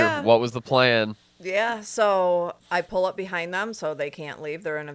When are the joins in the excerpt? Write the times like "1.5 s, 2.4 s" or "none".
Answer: 2.6 s